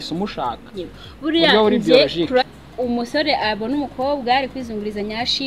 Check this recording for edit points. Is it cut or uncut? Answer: cut